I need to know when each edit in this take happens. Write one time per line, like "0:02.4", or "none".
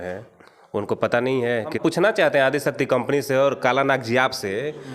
0:01.8